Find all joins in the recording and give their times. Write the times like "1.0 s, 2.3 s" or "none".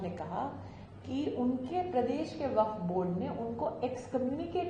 none